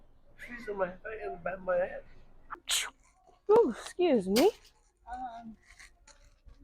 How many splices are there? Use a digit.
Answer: 1